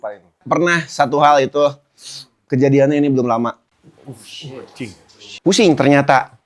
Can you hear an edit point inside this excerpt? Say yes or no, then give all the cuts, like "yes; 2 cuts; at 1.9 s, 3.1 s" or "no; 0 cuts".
yes; 1 cut; at 5.3 s